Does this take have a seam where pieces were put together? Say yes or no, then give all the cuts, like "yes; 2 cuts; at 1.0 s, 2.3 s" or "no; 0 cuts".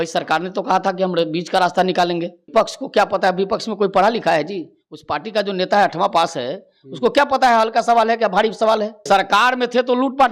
yes; 2 cuts; at 2.5 s, 9.0 s